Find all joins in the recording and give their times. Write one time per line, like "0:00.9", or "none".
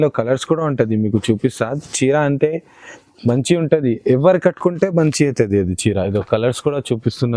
none

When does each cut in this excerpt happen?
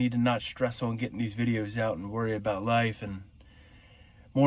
none

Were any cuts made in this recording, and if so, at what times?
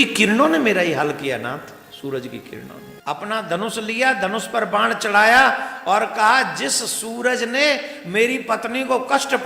0:02.9

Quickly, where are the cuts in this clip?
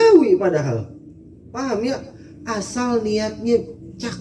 none

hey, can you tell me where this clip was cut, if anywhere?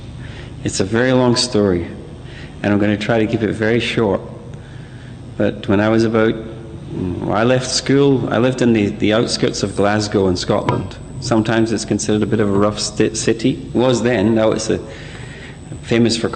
0:12.5

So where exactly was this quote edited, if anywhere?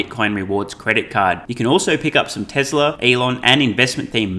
0:03.0

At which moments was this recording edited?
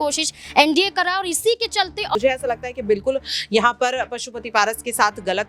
0:02.2

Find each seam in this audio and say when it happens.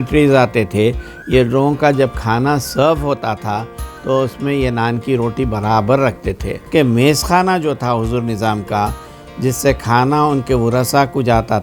0:06.7

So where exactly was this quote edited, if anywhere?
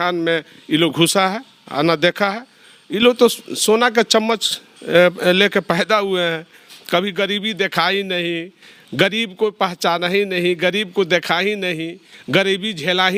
none

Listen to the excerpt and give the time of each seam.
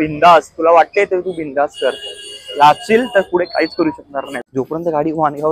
0:04.4

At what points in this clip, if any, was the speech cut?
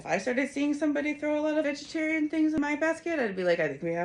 0:01.7
0:02.6

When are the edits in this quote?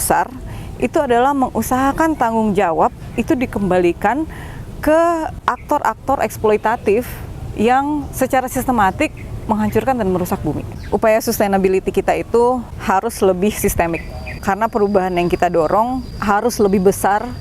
0:05.4
0:10.7
0:12.7
0:14.4
0:16.1

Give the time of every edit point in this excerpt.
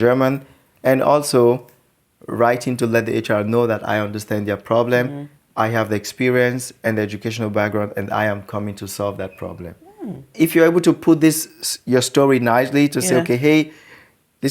0:10.3

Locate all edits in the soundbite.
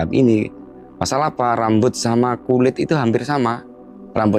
none

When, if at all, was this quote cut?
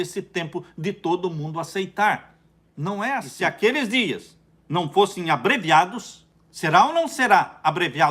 0:03.3

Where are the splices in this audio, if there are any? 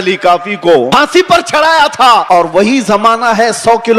0:00.9
0:02.3

